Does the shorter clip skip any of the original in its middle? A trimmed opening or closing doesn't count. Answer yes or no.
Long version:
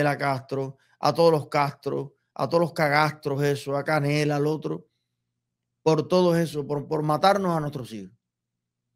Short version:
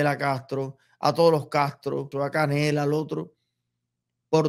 yes